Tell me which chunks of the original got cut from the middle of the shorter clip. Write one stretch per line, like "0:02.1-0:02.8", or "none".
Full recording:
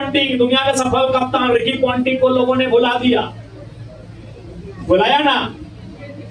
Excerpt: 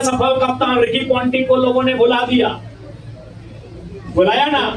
none